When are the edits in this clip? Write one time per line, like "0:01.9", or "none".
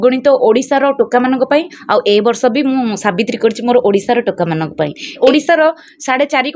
0:05.1